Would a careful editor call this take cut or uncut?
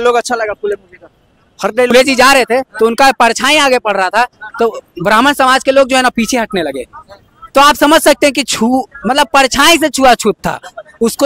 cut